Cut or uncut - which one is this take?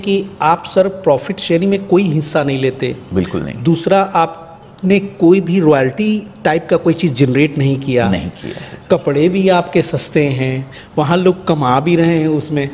uncut